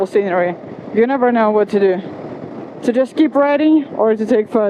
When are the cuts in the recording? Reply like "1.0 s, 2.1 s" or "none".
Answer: none